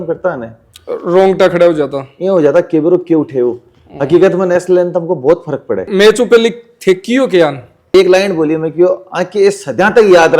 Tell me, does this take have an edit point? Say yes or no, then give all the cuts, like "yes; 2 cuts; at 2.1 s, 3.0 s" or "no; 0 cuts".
yes; 2 cuts; at 5.9 s, 7.9 s